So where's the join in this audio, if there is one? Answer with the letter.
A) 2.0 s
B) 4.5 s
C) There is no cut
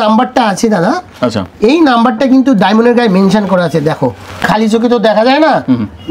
B